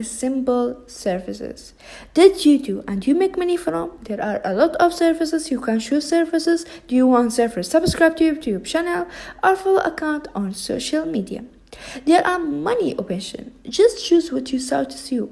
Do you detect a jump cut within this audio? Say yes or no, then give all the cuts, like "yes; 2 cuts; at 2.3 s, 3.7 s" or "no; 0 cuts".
no; 0 cuts